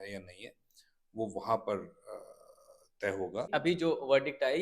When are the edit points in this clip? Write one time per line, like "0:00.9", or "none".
0:03.5